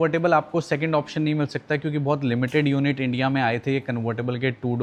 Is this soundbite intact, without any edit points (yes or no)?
yes